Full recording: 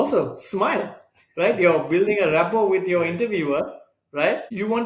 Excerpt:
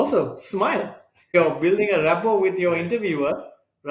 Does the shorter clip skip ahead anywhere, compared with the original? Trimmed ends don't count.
yes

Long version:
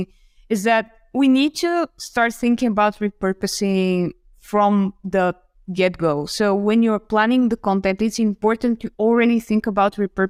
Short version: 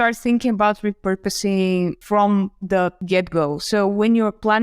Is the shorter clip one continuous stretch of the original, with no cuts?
no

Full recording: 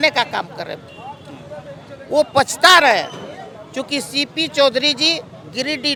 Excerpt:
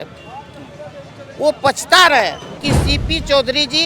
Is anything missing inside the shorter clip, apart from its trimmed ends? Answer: yes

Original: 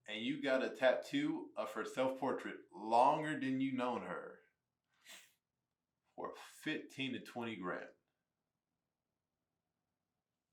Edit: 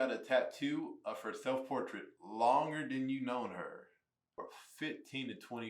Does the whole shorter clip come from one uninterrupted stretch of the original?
no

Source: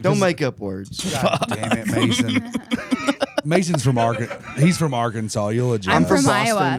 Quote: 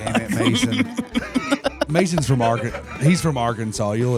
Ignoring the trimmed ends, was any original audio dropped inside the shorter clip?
no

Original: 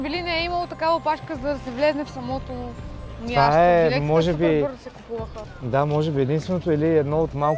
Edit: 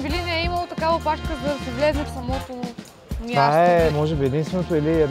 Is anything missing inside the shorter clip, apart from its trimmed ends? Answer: yes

